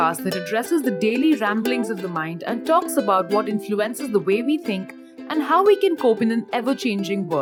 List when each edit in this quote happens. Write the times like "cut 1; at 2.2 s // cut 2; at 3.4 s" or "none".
none